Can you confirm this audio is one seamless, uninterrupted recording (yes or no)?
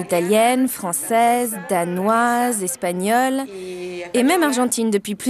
yes